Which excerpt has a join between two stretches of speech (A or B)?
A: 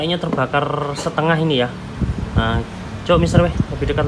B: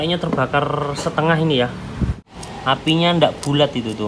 B